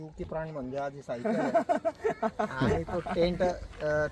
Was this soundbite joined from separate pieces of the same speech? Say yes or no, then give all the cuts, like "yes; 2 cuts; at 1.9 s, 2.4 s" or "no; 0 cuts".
no; 0 cuts